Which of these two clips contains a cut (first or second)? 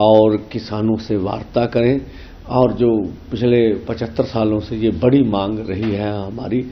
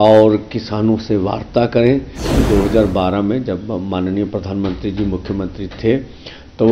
second